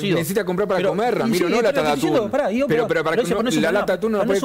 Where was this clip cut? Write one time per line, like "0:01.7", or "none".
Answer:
none